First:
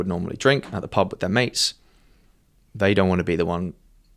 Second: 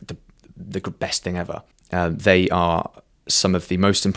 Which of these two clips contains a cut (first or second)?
second